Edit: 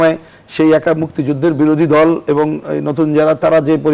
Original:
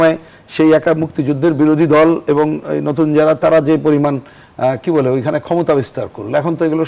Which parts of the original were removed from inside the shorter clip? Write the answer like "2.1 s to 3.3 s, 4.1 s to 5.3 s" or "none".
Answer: none